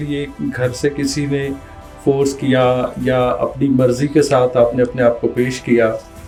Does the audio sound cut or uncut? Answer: uncut